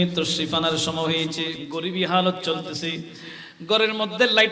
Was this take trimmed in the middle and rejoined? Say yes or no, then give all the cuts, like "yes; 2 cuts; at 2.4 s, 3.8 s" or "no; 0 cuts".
yes; 1 cut; at 1.6 s